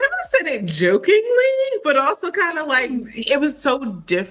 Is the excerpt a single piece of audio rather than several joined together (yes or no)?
yes